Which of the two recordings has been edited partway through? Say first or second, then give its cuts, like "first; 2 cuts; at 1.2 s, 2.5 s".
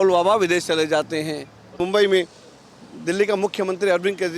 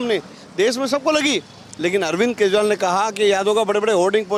first; 1 cut; at 1.7 s